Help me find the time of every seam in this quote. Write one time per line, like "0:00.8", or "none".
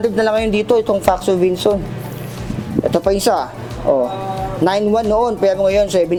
none